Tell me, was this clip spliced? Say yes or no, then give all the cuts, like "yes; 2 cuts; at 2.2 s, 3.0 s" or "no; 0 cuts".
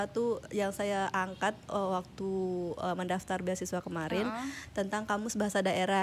no; 0 cuts